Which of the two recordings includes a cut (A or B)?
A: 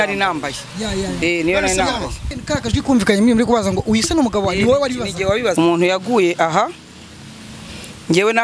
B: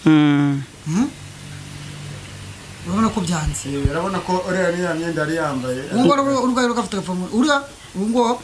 A